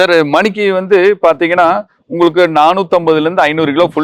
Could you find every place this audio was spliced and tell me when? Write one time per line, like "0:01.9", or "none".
none